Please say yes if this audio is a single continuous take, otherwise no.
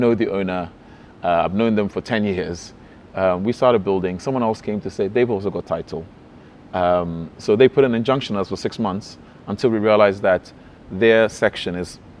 yes